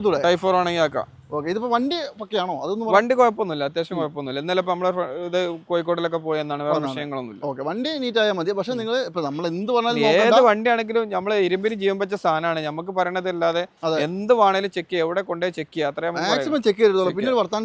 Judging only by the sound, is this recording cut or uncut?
uncut